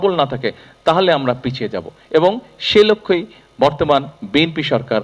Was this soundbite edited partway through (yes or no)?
no